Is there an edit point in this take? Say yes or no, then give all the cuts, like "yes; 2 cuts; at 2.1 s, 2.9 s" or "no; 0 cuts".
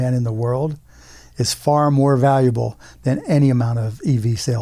no; 0 cuts